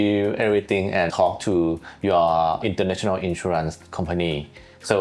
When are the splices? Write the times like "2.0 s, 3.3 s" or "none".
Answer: 1.1 s, 2.6 s

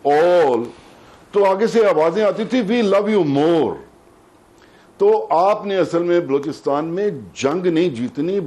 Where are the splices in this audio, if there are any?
none

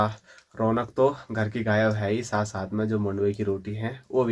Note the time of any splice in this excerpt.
none

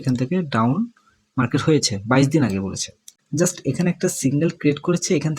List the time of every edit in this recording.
3.1 s

